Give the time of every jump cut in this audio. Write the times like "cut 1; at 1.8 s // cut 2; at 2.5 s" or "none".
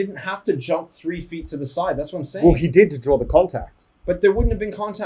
none